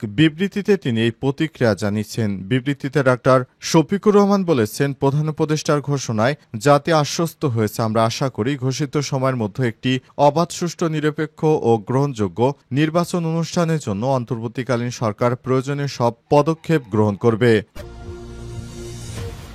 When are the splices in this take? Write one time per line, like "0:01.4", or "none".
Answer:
0:17.7